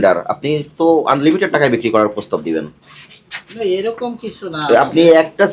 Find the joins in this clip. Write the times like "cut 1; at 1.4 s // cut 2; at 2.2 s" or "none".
none